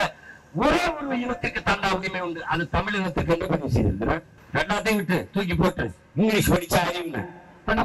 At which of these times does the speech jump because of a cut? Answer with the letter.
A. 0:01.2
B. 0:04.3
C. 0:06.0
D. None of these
B